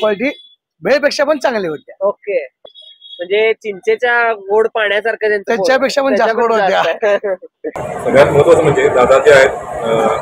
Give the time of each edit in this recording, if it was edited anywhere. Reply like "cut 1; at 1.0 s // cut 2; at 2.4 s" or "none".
cut 1; at 2.6 s // cut 2; at 7.7 s